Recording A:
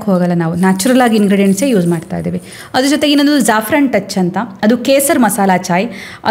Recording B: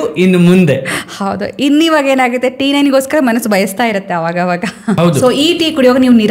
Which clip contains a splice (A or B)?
B